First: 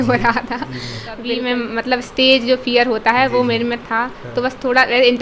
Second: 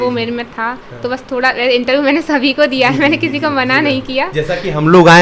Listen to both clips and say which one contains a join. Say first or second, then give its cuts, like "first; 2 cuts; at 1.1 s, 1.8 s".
first; 1 cut; at 1.3 s